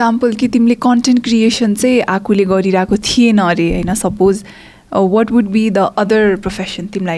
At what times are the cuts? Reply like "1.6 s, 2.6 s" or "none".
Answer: none